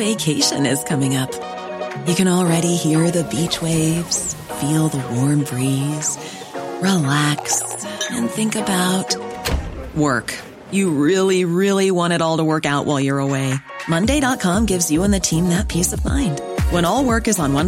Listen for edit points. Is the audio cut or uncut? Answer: uncut